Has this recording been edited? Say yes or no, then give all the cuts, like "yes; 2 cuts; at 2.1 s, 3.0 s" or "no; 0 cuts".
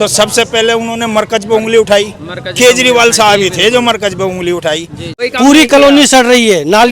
yes; 1 cut; at 5.0 s